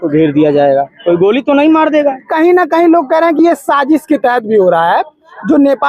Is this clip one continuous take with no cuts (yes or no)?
no